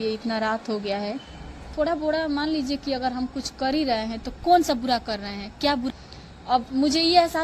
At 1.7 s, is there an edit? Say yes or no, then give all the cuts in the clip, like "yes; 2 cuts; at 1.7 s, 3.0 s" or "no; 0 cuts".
yes; 2 cuts; at 1.7 s, 5.9 s